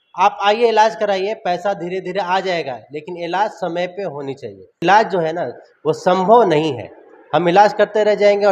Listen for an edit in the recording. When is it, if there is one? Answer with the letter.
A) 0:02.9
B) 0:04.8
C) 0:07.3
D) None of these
B